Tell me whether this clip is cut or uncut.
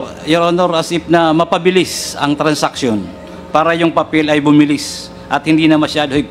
uncut